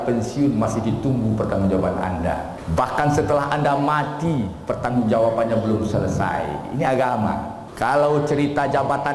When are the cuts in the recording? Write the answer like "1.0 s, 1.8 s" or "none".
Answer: 2.6 s, 7.6 s